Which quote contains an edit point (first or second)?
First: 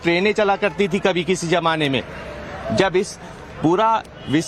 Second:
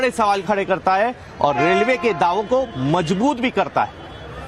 first